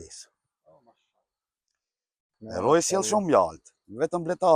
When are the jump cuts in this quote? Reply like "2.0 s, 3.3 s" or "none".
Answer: 2.3 s